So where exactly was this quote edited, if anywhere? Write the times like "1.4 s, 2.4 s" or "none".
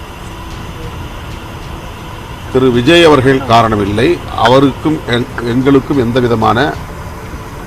none